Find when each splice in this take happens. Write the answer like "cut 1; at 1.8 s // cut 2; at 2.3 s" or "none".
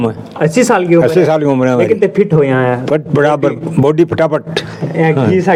none